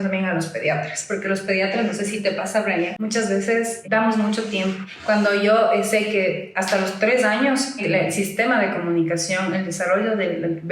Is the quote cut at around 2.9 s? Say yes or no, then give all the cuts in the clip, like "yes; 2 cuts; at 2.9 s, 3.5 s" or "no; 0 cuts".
yes; 4 cuts; at 2.9 s, 3.8 s, 4.9 s, 7.8 s